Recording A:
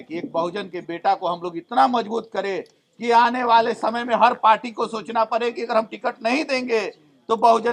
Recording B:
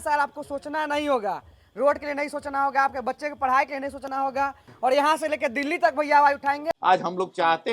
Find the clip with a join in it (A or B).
B